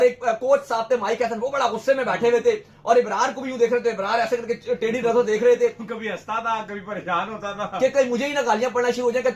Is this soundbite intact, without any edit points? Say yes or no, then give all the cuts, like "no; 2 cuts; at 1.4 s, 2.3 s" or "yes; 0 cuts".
yes; 0 cuts